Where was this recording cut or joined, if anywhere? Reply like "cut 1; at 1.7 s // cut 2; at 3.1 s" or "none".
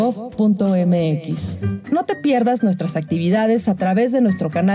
none

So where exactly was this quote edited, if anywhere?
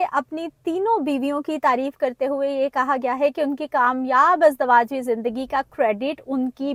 none

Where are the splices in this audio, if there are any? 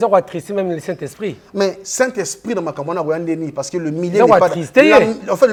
none

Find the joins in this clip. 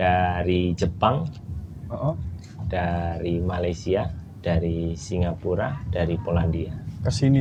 none

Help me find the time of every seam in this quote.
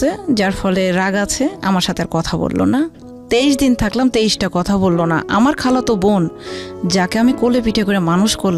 none

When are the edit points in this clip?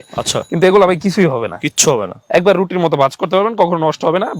none

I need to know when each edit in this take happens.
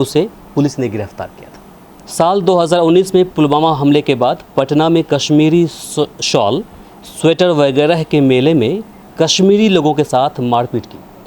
cut 1; at 2.0 s

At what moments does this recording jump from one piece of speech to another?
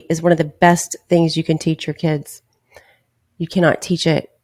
none

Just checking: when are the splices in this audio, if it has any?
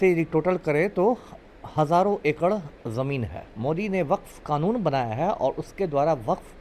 cut 1; at 3.4 s

